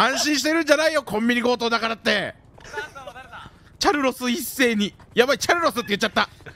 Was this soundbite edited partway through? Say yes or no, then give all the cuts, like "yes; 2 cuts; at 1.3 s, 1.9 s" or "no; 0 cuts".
yes; 2 cuts; at 2.5 s, 5.0 s